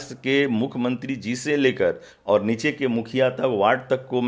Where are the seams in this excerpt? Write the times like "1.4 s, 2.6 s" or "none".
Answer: none